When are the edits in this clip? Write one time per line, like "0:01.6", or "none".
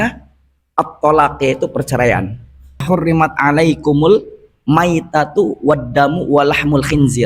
0:02.8